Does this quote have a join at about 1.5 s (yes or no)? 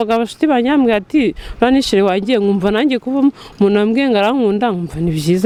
no